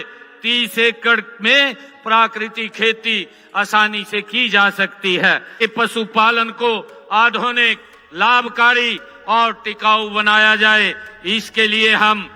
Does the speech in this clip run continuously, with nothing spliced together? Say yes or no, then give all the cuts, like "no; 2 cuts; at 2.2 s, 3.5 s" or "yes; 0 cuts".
no; 1 cut; at 5.6 s